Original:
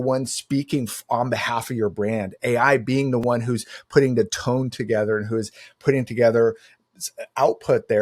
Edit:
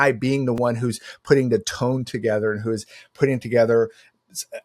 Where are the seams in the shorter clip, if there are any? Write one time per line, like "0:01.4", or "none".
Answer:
none